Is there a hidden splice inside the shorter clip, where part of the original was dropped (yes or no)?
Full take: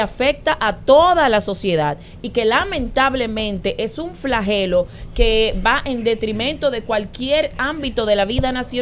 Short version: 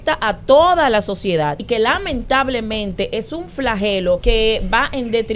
yes